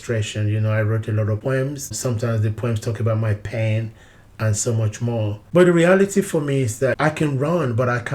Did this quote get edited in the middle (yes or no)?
yes